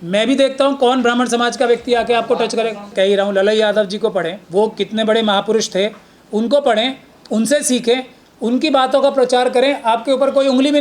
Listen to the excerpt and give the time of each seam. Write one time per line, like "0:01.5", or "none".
0:02.9
0:04.4